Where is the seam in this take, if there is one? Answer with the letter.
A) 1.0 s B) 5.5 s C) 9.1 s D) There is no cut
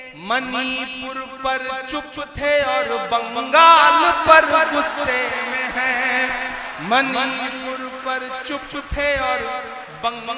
D